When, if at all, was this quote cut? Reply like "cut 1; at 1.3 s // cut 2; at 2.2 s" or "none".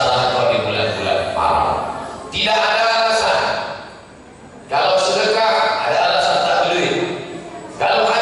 none